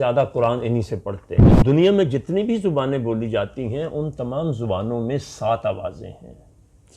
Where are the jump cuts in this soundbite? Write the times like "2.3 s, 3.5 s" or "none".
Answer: 1.6 s

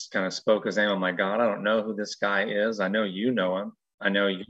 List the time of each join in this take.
none

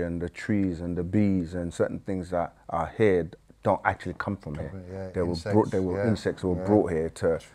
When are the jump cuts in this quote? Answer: none

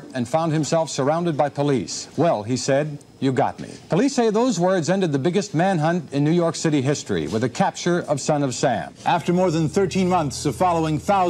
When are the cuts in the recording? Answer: 2.0 s, 3.7 s, 8.9 s

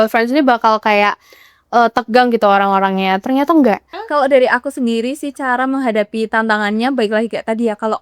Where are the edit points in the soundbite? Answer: 3.9 s

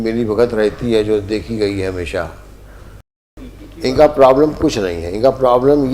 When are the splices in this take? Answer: 3.4 s

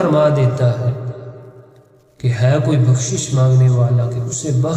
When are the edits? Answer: none

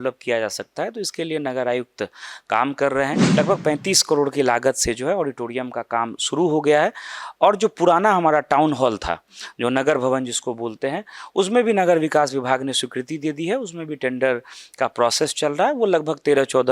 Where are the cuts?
3.2 s

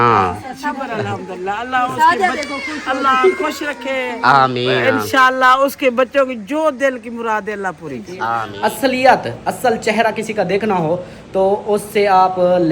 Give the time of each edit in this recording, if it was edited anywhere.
8.4 s

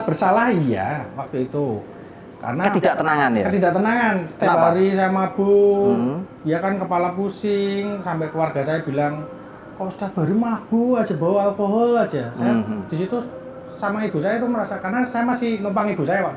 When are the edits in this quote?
none

